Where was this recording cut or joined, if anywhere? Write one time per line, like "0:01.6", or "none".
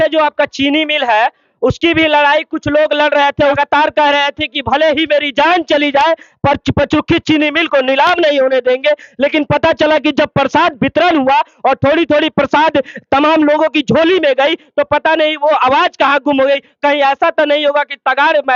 none

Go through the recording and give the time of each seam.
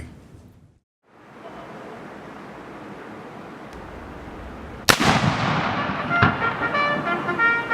0:05.9

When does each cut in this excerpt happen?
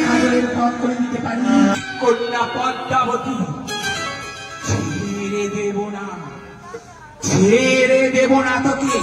0:01.8

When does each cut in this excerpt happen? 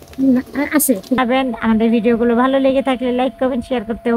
0:01.2

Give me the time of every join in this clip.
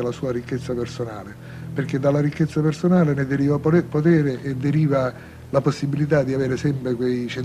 none

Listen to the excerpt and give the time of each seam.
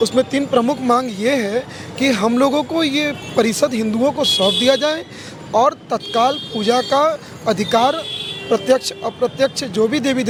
none

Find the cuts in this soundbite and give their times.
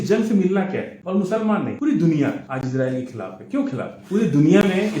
0:01.0
0:01.7
0:02.5
0:04.0

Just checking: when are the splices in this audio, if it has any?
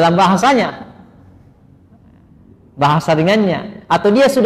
none

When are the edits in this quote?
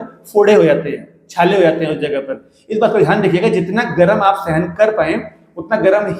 none

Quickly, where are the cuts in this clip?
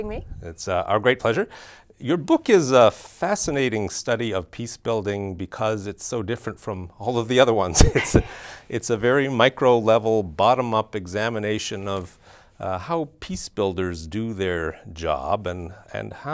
0:08.1

